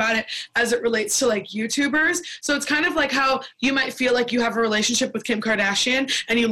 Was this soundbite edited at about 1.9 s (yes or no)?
no